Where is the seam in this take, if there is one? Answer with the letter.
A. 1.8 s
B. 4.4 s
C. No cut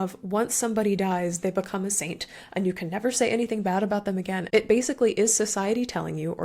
B